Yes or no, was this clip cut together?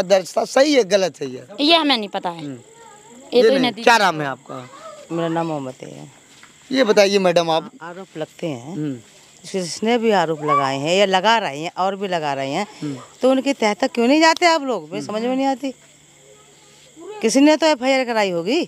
no